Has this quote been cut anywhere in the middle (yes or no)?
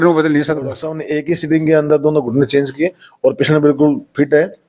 yes